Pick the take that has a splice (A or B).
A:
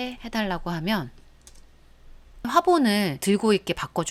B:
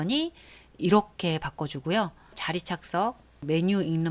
B